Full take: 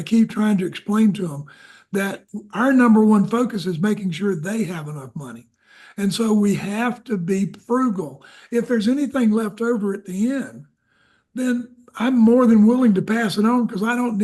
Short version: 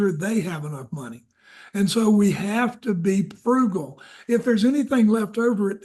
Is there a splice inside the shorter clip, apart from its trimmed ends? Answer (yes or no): no